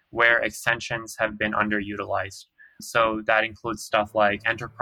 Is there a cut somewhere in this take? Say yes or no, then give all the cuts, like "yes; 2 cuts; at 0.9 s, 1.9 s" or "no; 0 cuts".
yes; 1 cut; at 2.8 s